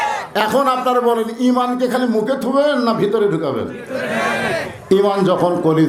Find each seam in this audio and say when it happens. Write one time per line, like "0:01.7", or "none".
none